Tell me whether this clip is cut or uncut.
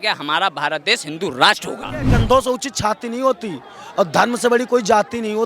cut